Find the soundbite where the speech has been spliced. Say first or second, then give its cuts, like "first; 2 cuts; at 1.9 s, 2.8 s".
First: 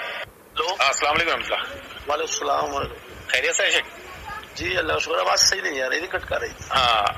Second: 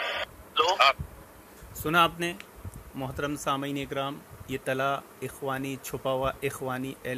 first; 2 cuts; at 0.9 s, 5.4 s